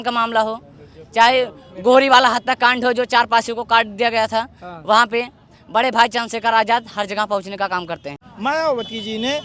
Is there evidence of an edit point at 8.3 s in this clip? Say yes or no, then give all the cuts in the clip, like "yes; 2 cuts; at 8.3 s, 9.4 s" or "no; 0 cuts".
yes; 1 cut; at 8.3 s